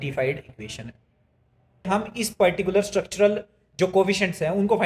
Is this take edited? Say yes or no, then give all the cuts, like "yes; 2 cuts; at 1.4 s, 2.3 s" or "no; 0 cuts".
yes; 1 cut; at 1.9 s